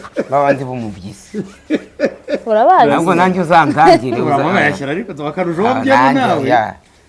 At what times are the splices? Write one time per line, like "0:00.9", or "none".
none